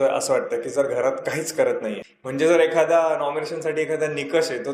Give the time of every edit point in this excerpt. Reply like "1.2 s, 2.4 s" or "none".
2.0 s